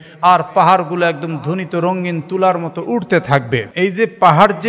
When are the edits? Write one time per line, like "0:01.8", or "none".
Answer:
0:03.7